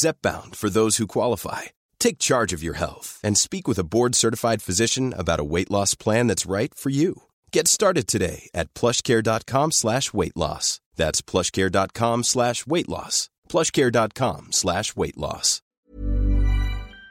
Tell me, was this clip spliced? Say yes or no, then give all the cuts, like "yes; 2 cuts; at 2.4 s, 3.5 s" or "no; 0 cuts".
yes; 1 cut; at 15.8 s